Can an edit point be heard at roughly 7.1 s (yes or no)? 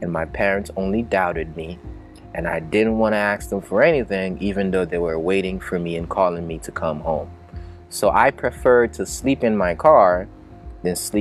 no